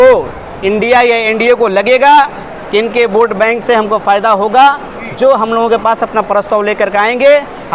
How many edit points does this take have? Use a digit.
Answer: 0